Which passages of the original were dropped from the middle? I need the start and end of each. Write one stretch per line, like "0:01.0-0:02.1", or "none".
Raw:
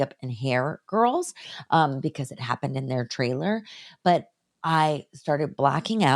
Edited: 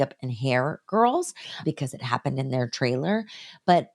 0:01.6-0:02.0